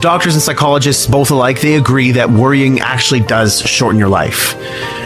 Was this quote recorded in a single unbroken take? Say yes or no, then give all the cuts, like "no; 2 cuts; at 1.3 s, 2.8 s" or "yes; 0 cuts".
yes; 0 cuts